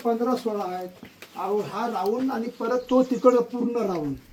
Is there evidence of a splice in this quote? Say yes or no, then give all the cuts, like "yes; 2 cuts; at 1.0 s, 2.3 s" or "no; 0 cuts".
no; 0 cuts